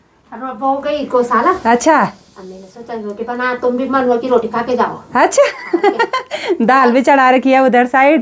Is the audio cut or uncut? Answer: uncut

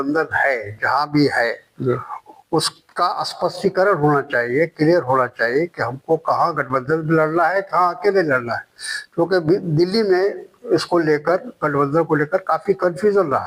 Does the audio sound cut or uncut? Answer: uncut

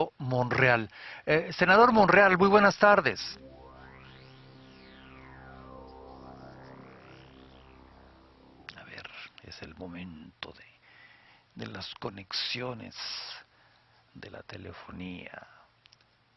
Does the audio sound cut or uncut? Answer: cut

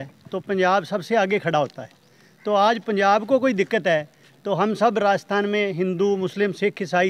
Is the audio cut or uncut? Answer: uncut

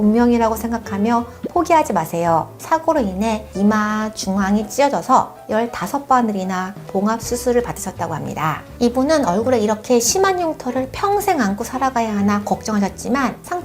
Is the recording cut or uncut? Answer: cut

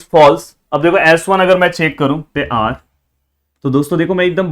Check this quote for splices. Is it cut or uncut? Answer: cut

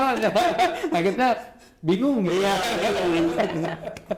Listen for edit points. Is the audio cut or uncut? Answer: uncut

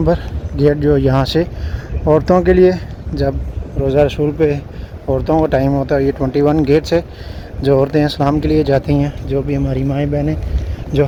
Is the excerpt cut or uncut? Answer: uncut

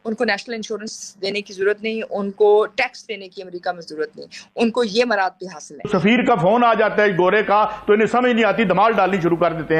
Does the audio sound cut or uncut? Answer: cut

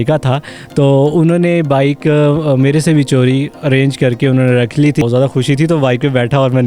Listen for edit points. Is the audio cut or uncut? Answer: cut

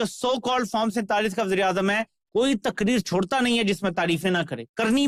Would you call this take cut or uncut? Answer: uncut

